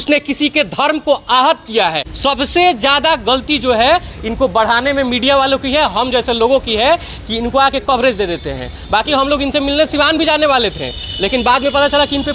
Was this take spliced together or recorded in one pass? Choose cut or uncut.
cut